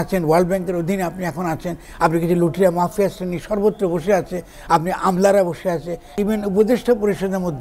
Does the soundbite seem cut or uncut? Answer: cut